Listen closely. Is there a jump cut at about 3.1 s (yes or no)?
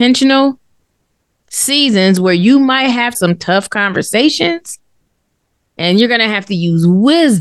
yes